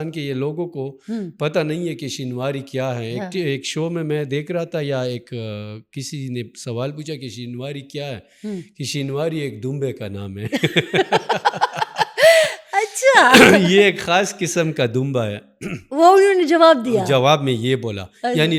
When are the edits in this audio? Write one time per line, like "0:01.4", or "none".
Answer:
none